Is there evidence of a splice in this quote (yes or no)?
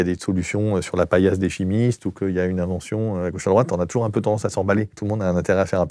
yes